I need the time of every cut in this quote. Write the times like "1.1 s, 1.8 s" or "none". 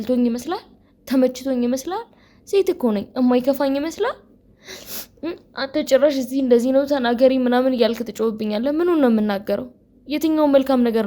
none